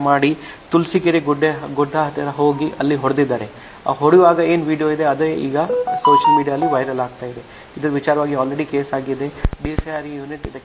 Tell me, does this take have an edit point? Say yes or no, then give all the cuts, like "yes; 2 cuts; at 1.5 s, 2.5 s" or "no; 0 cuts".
no; 0 cuts